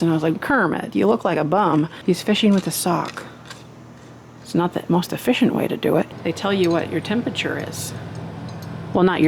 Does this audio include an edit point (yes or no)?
yes